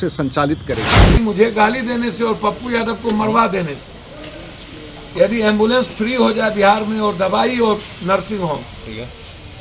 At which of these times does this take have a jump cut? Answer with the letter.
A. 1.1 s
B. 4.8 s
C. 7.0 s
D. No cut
A